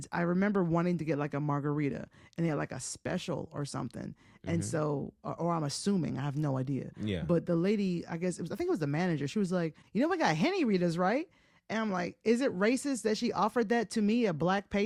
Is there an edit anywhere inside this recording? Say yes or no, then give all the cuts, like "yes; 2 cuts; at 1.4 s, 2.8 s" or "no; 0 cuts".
no; 0 cuts